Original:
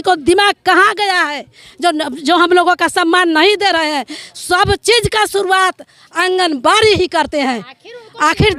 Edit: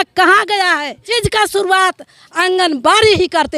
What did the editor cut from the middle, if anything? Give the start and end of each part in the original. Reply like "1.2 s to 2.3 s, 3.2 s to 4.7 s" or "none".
1.7 s to 5.0 s